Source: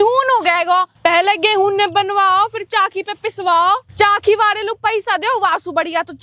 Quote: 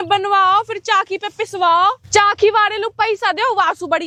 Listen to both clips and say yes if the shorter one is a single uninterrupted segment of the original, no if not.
yes